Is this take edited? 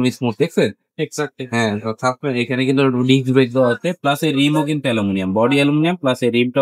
no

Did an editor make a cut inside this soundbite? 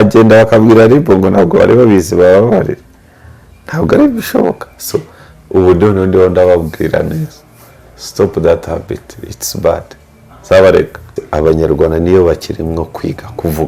yes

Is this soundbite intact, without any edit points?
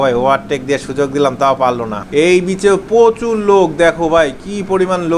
no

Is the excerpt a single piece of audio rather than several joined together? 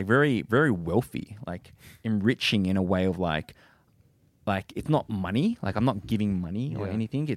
yes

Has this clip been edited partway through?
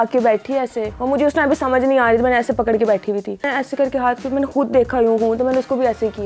yes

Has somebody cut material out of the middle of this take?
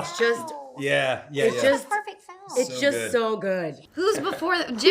yes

